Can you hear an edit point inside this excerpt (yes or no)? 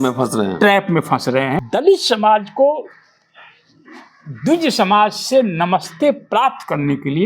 yes